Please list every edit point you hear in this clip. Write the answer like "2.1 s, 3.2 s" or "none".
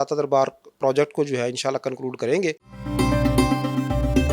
2.7 s